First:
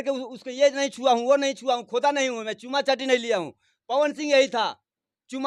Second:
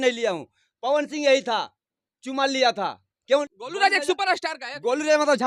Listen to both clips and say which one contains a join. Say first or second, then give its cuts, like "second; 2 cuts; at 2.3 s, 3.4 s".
second; 1 cut; at 3.4 s